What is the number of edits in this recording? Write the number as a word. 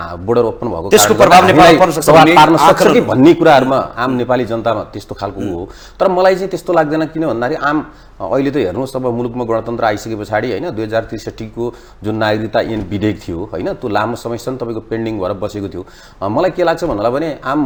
zero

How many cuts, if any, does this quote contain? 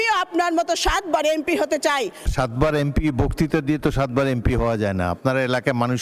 one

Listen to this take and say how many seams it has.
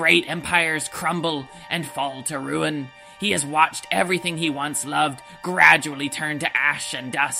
zero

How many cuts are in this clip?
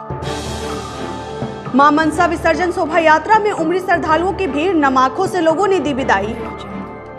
zero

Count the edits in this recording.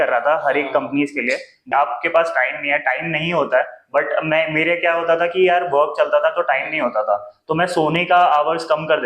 one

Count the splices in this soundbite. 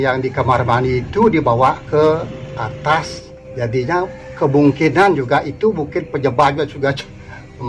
one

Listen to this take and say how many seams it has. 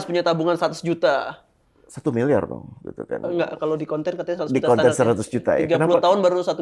zero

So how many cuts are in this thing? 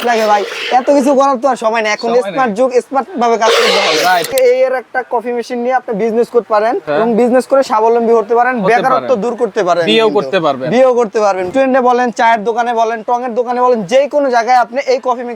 three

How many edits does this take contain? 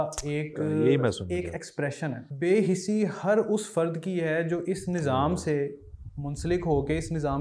one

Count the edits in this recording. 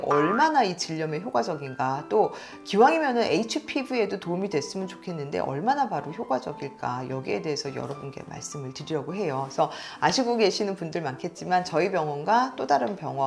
zero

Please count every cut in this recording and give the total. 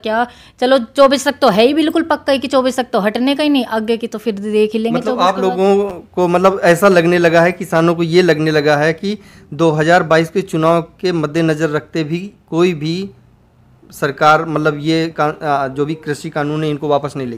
zero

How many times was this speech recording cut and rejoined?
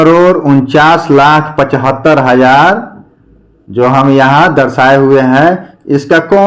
zero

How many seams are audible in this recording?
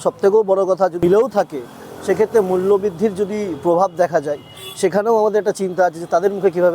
one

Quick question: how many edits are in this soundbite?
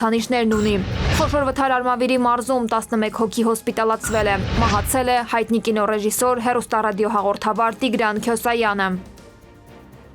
two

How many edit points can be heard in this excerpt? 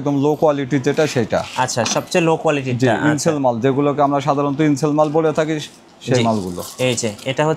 zero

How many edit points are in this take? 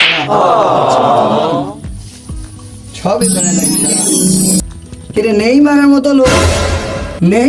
one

